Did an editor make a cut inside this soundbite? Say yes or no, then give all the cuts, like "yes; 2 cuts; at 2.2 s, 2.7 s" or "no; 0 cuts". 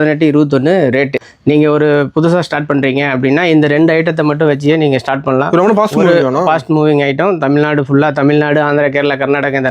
yes; 1 cut; at 1.2 s